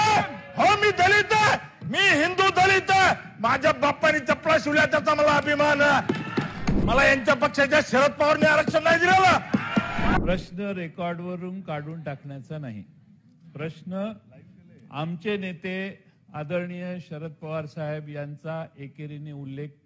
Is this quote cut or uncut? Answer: cut